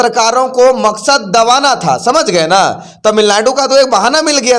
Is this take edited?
no; 0 cuts

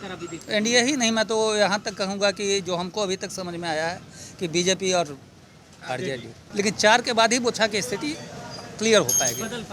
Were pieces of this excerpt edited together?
yes; 1 cut; at 6.4 s

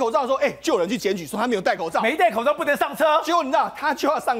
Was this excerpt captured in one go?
yes; 0 cuts

